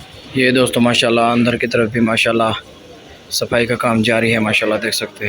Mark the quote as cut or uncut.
uncut